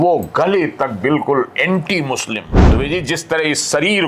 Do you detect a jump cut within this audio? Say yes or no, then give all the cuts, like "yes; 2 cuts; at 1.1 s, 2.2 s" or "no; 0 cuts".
yes; 1 cut; at 2.5 s